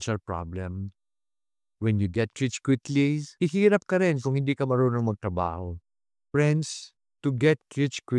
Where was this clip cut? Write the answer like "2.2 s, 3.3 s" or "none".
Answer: 3.3 s